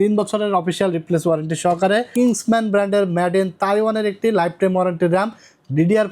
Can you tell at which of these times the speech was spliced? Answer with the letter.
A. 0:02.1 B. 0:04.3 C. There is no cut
A